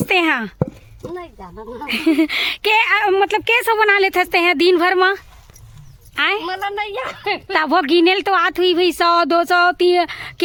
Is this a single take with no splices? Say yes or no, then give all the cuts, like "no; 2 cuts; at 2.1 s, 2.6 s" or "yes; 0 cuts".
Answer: yes; 0 cuts